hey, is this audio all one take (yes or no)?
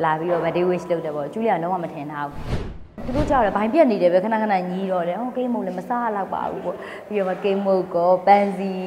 no